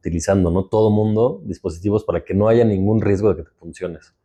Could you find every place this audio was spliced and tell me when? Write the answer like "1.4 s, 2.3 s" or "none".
none